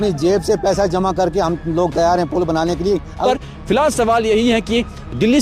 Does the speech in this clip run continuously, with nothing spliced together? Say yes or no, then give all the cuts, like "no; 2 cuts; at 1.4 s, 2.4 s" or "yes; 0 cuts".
no; 1 cut; at 3.2 s